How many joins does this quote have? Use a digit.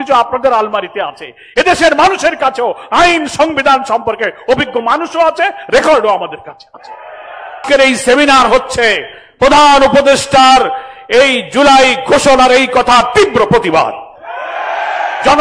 1